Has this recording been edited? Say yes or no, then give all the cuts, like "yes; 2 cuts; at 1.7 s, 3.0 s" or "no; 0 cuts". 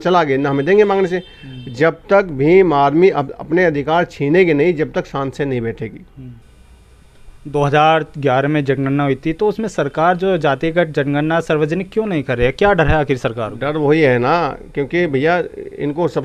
no; 0 cuts